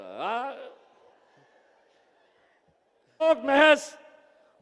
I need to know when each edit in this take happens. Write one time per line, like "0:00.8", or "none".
0:03.2